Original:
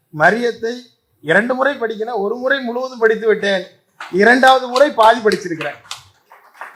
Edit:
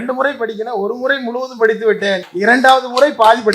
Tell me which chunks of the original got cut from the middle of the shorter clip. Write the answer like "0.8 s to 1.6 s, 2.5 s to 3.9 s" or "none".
3.7 s to 4.1 s